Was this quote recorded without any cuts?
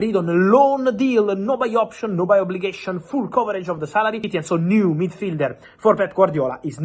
no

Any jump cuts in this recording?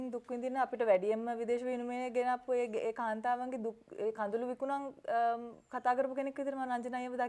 no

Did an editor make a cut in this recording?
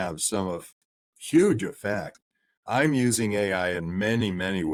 no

